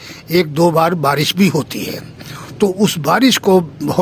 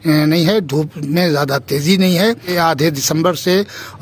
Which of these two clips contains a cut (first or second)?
second